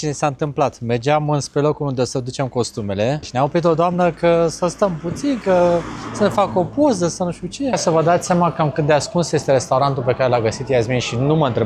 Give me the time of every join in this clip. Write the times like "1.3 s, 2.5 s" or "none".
3.3 s, 7.8 s